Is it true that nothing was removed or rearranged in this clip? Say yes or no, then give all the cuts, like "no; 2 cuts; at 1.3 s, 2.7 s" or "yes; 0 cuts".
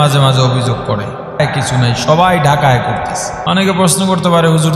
no; 2 cuts; at 1.4 s, 3.3 s